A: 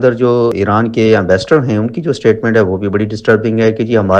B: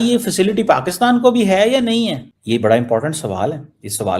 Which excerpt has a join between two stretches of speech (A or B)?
B